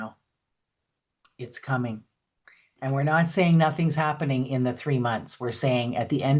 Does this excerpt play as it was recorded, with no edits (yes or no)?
yes